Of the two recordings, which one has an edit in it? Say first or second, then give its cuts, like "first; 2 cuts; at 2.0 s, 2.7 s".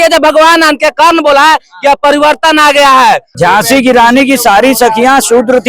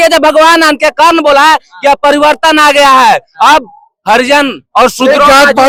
first; 1 cut; at 3.3 s